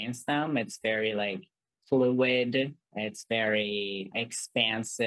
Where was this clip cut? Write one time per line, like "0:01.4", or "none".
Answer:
0:02.8
0:04.1

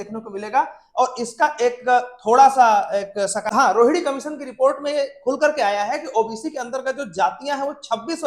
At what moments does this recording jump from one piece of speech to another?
0:03.5

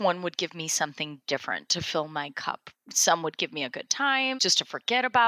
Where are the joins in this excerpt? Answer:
0:02.7
0:04.4

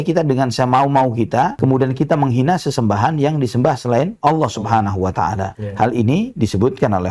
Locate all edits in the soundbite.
none

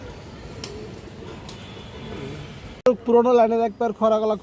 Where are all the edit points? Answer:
0:02.8

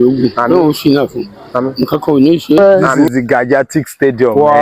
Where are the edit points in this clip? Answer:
0:02.6

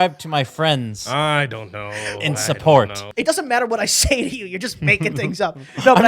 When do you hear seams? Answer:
0:03.0

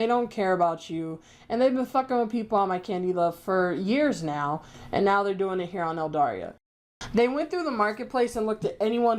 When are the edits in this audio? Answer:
0:04.7
0:06.8

